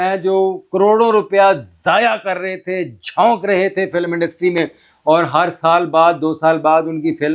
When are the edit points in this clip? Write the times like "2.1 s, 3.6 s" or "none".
none